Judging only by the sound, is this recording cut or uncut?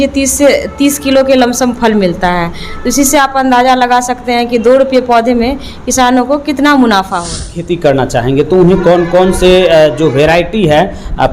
cut